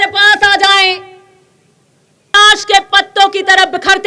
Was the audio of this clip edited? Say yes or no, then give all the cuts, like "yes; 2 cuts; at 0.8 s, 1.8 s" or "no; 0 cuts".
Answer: yes; 1 cut; at 2.3 s